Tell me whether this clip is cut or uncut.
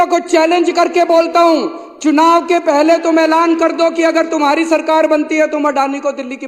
uncut